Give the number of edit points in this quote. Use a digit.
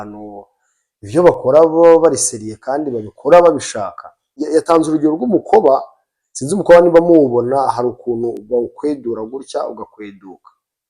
1